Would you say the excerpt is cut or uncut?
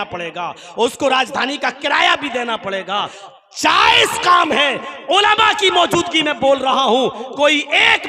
cut